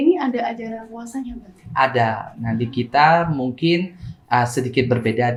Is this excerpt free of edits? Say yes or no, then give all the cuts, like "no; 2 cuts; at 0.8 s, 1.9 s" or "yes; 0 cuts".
yes; 0 cuts